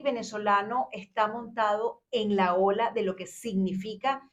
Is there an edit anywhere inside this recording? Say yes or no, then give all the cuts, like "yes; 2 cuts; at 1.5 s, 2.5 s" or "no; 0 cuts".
no; 0 cuts